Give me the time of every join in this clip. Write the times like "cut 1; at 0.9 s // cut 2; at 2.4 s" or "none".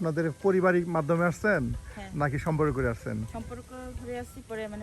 none